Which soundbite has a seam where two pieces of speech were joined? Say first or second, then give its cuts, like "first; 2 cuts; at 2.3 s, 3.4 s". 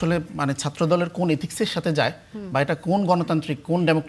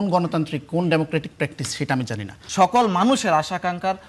second; 1 cut; at 2.4 s